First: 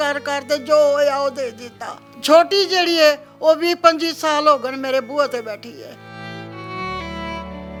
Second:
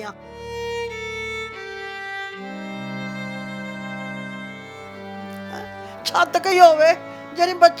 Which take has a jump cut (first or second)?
second